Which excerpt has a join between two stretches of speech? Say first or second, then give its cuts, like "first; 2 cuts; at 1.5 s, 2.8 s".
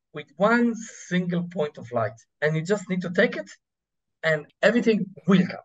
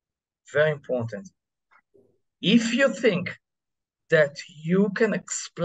first; 2 cuts; at 2.2 s, 4.4 s